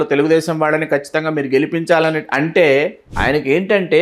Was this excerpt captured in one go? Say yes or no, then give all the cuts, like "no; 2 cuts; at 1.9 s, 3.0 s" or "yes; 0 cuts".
no; 1 cut; at 3.1 s